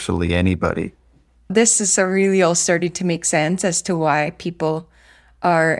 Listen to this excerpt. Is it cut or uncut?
cut